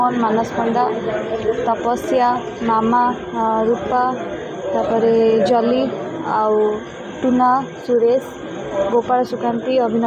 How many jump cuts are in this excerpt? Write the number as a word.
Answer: zero